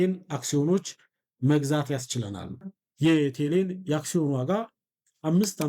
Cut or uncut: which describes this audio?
cut